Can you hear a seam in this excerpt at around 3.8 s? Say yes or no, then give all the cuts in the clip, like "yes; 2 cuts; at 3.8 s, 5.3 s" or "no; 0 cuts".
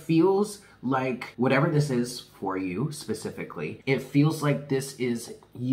yes; 2 cuts; at 1.2 s, 3.8 s